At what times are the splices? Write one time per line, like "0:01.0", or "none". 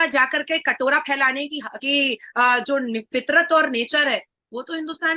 none